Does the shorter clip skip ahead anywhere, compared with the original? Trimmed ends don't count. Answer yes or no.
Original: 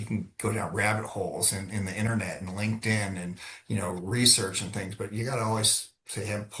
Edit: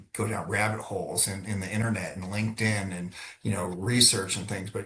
no